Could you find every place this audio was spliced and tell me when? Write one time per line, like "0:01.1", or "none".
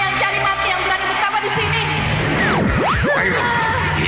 none